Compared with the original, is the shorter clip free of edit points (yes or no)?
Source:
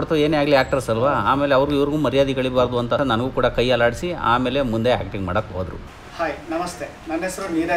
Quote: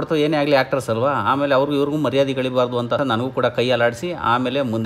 yes